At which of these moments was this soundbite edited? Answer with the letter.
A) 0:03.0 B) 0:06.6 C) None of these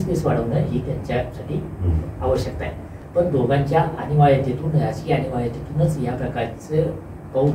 A